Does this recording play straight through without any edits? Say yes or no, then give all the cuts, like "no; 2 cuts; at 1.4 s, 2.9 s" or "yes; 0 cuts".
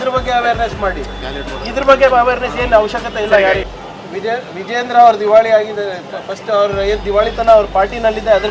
no; 1 cut; at 3.7 s